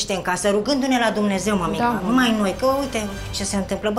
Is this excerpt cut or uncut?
uncut